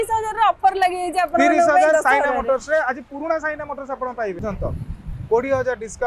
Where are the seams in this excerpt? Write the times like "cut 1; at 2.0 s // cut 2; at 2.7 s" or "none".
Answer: cut 1; at 4.4 s